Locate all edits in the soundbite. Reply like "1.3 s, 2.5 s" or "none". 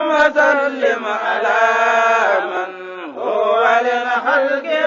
none